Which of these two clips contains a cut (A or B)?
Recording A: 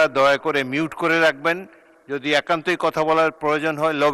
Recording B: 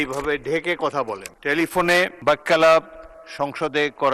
B